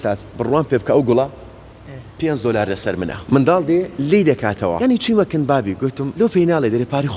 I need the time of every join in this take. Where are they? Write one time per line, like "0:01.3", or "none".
0:03.2
0:04.8
0:06.0